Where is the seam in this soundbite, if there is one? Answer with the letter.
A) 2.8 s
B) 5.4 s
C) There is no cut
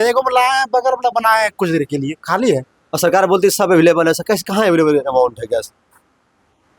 A